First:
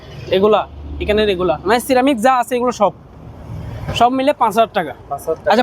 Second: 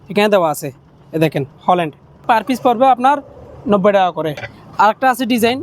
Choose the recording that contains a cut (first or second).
second